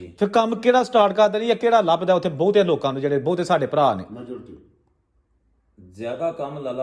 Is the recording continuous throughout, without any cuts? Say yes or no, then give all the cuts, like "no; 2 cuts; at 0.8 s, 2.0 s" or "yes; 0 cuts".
yes; 0 cuts